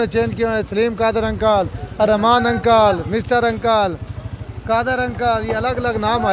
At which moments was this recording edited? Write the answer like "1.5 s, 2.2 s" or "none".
none